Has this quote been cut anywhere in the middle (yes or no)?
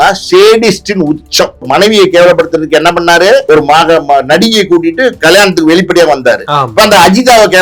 yes